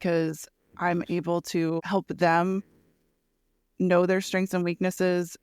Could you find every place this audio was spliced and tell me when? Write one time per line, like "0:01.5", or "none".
0:01.8